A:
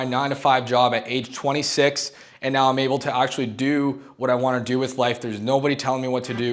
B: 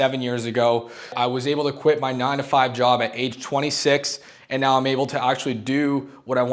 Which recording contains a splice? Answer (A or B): B